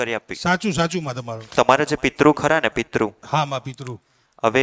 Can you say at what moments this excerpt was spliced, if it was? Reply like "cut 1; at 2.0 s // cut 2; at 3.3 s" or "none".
cut 1; at 1.4 s